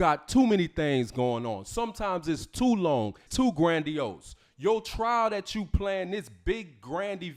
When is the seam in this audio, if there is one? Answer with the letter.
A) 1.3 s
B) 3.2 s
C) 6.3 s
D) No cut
B